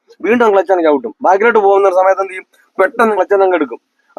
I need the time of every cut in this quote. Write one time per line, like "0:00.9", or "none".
0:03.1

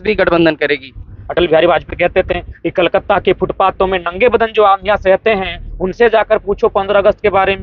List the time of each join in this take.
0:01.2

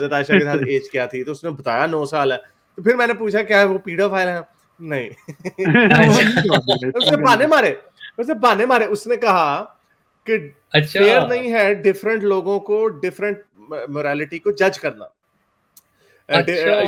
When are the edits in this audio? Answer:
none

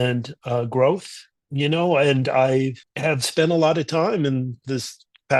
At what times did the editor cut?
none

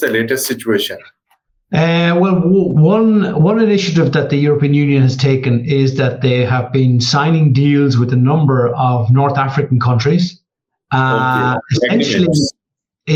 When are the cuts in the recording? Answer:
none

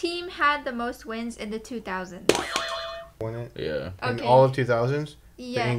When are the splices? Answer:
0:03.2

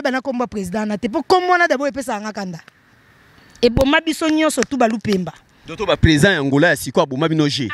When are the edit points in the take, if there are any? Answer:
none

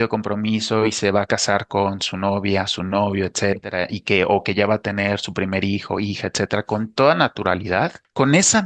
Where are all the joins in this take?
none

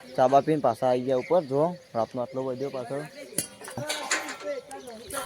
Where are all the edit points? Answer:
0:03.8

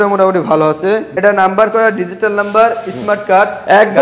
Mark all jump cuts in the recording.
0:01.1

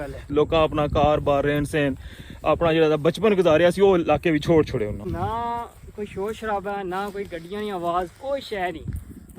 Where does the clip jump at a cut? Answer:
0:05.1

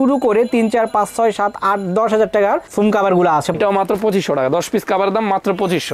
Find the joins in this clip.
0:03.5

